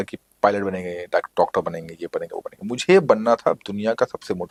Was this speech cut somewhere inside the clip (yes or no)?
no